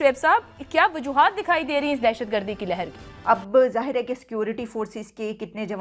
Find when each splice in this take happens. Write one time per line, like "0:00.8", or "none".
0:03.1

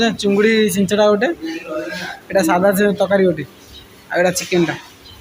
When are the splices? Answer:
none

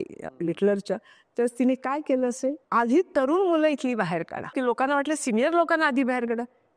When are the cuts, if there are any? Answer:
0:02.6
0:04.5

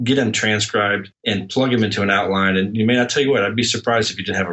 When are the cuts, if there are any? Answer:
0:01.1

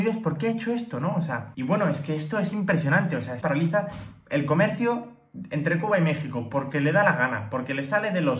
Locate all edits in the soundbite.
0:01.5
0:03.4

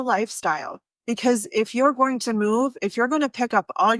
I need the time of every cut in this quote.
none

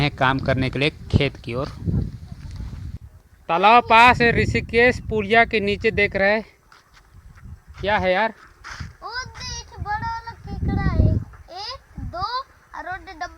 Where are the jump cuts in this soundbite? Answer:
none

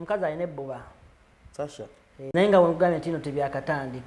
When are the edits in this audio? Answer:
0:02.3

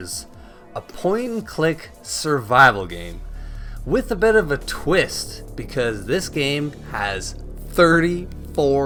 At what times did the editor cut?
none

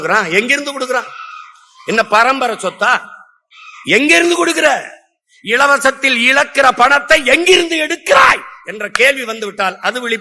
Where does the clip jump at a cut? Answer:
none

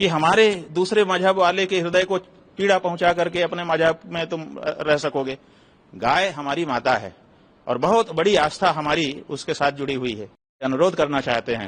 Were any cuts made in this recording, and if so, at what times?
0:10.6

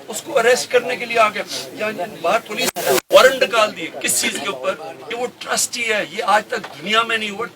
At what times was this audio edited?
0:05.0

